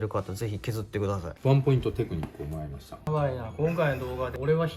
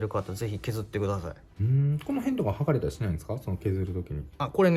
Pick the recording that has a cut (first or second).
first